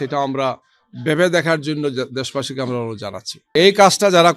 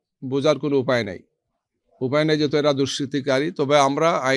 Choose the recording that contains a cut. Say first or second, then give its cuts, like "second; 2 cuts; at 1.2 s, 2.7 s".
first; 1 cut; at 3.3 s